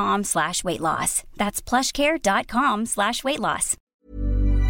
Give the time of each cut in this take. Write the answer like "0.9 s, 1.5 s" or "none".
3.8 s